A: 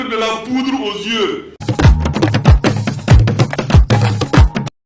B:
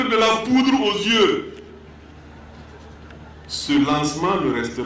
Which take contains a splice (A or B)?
B